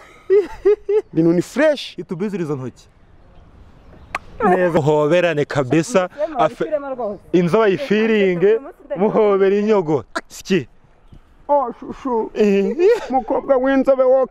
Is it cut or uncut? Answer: cut